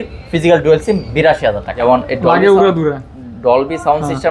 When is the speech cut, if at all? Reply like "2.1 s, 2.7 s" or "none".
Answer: 1.7 s